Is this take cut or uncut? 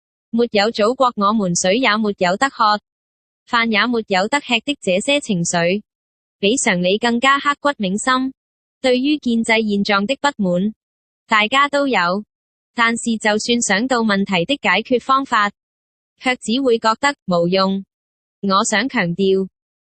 uncut